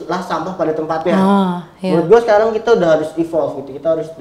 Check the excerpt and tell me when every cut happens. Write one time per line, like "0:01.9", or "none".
none